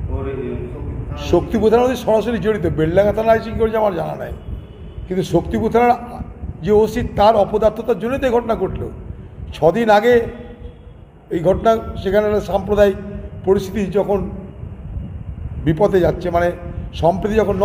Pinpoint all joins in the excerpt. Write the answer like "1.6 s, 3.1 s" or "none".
none